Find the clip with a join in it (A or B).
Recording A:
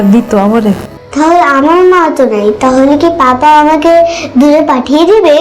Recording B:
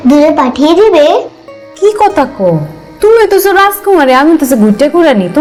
A